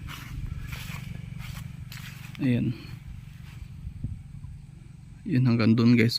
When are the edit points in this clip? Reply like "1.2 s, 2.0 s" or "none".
none